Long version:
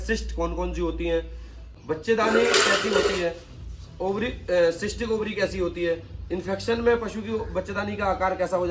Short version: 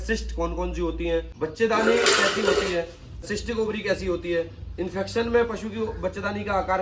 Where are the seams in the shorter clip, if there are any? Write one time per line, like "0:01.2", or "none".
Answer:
0:01.3
0:03.3